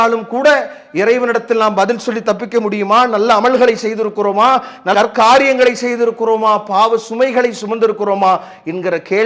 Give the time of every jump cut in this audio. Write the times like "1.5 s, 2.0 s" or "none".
none